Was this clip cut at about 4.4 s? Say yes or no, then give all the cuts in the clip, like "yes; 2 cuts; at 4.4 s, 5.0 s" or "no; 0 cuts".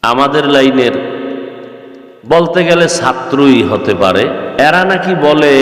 yes; 1 cut; at 4.4 s